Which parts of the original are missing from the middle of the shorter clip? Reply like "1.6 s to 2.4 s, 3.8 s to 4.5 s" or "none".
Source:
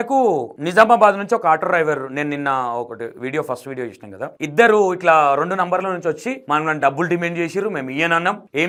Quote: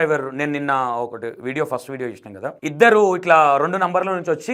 none